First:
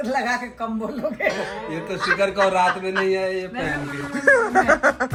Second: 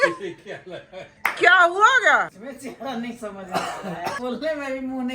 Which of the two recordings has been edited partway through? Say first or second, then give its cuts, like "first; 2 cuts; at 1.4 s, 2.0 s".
second; 1 cut; at 4.2 s